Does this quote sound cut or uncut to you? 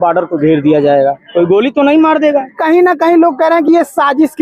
cut